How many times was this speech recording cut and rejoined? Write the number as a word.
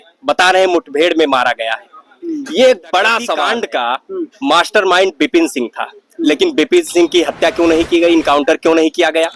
one